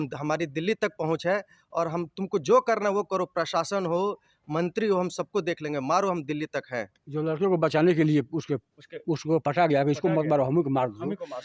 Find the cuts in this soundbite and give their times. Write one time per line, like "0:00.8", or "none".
0:07.0